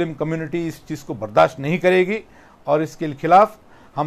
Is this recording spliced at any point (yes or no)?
no